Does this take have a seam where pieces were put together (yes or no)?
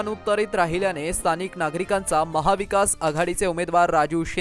no